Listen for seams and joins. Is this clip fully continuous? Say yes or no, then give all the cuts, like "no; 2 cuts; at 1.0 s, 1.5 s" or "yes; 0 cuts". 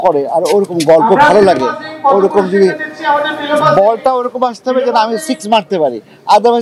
yes; 0 cuts